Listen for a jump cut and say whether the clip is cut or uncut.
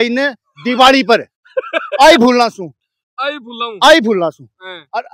uncut